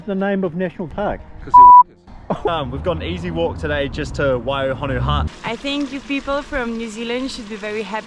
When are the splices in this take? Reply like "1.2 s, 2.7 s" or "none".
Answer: 1.0 s, 2.1 s, 5.3 s